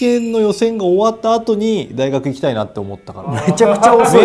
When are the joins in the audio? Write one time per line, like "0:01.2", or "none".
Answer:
0:03.3